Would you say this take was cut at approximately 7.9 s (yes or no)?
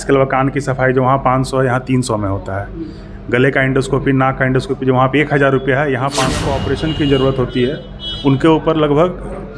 no